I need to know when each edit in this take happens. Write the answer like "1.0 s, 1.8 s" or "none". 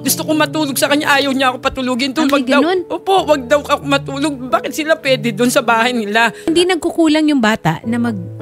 6.5 s

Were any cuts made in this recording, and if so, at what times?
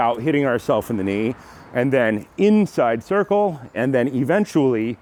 none

